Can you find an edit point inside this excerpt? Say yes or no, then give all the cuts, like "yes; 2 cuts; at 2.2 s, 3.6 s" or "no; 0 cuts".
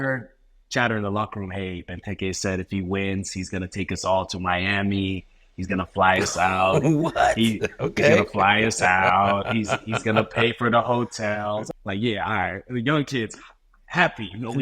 yes; 1 cut; at 11.7 s